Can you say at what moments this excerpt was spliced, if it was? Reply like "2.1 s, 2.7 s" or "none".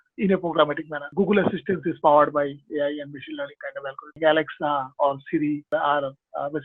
1.0 s, 4.2 s, 5.7 s